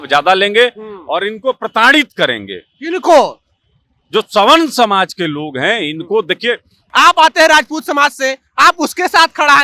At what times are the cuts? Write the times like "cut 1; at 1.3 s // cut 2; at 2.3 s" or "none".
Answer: cut 1; at 6.8 s